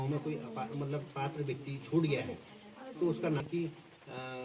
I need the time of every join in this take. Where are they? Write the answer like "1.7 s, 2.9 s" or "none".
3.4 s